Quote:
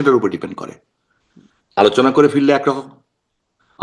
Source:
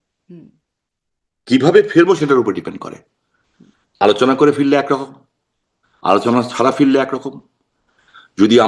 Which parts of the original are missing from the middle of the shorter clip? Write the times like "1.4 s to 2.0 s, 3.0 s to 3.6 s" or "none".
none